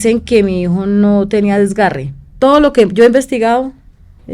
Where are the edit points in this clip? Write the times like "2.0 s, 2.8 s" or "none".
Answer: 2.3 s